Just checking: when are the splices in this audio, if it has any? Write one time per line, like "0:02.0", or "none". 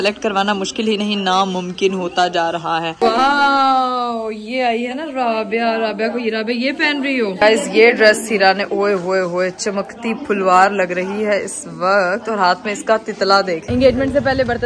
0:02.9
0:07.3
0:13.7